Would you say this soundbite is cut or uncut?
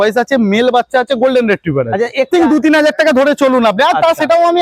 cut